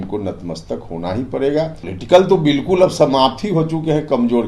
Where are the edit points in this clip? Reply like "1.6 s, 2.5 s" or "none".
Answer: 1.9 s